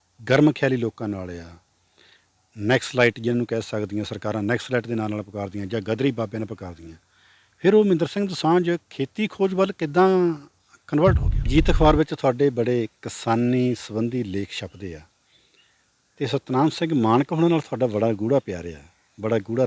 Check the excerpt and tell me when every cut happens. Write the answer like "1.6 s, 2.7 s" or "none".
11.3 s